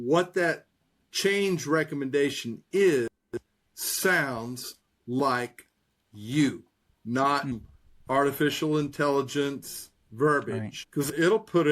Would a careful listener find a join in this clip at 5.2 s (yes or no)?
no